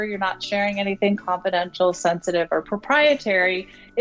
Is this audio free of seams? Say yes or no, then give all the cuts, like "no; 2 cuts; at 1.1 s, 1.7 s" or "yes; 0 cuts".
no; 1 cut; at 2.7 s